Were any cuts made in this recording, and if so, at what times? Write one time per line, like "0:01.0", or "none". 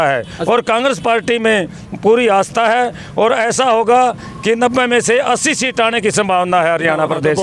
none